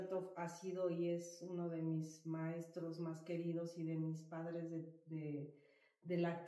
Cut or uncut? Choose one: uncut